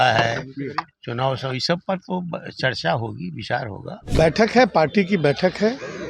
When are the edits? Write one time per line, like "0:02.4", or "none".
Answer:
0:04.0